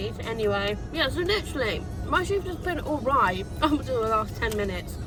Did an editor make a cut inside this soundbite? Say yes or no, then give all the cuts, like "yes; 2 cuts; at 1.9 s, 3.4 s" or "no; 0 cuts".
no; 0 cuts